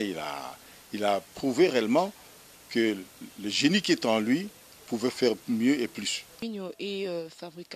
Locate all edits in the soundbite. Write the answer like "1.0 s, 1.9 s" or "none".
6.4 s